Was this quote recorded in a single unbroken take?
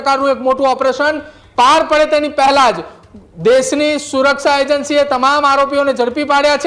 yes; 0 cuts

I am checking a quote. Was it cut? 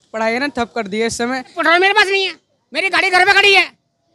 yes; 1 cut; at 1.6 s

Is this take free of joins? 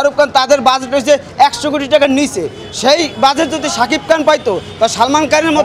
yes; 0 cuts

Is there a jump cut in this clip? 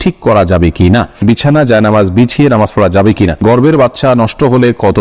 yes; 2 cuts; at 1.2 s, 3.7 s

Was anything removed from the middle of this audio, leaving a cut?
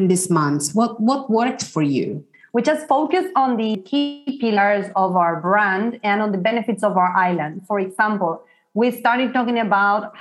yes; 1 cut; at 3.8 s

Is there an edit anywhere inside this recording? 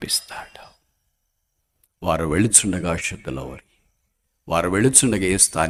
no; 0 cuts

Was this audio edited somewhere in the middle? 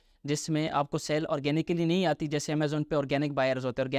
no; 0 cuts

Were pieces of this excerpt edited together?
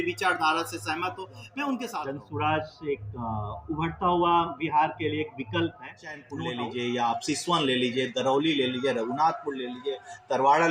yes; 2 cuts; at 2.0 s, 6.5 s

